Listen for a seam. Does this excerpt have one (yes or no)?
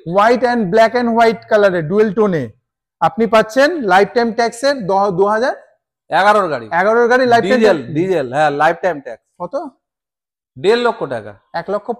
no